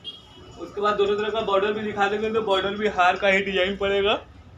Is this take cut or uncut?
uncut